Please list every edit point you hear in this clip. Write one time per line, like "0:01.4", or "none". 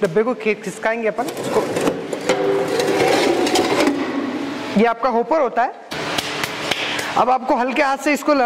0:05.9